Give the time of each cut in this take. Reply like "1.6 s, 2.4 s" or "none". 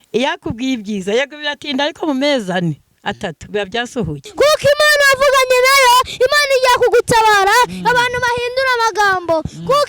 4.2 s